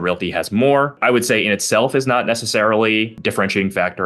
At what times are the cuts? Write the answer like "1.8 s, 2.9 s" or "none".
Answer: 0.9 s, 3.1 s